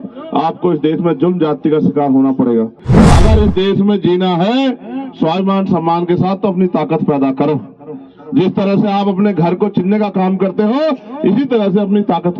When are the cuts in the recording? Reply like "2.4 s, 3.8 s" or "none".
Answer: 2.9 s